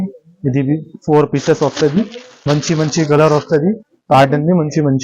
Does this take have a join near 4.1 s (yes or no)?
no